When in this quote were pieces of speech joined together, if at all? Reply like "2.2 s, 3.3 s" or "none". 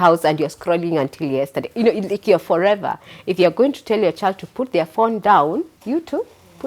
5.8 s